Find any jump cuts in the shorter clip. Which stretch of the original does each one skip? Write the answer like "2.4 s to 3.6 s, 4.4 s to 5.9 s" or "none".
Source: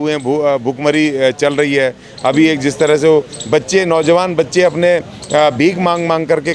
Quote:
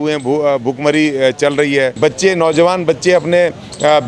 1.9 s to 3.4 s